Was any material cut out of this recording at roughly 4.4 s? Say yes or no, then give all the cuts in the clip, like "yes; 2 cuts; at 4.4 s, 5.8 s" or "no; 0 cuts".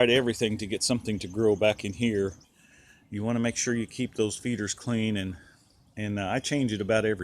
no; 1 cut; at 2.5 s